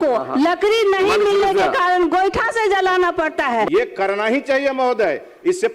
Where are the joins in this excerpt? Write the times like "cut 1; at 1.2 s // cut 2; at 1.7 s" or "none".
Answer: cut 1; at 3.7 s